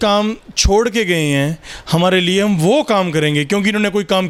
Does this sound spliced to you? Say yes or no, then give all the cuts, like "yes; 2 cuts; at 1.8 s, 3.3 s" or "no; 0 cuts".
no; 0 cuts